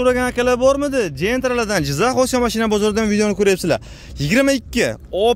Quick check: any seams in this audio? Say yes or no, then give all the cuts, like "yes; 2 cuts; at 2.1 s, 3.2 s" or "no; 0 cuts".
no; 0 cuts